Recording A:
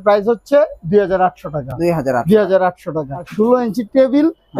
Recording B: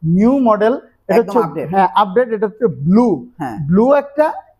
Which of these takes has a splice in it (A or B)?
A